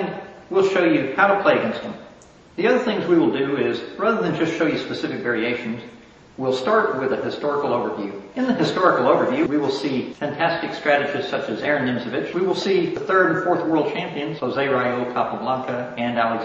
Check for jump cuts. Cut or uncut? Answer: uncut